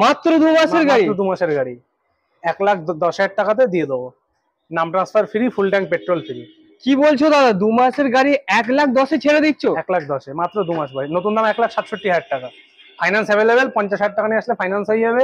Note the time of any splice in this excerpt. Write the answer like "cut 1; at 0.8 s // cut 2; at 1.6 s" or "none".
none